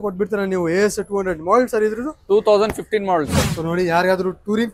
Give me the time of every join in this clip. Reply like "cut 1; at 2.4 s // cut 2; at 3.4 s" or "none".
cut 1; at 3.5 s